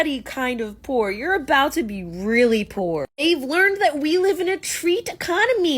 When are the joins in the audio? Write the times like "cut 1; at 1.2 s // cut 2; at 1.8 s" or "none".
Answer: none